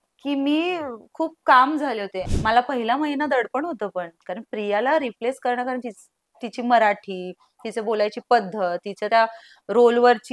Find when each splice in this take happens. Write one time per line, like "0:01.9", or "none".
0:02.2